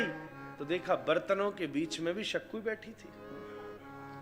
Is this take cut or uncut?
uncut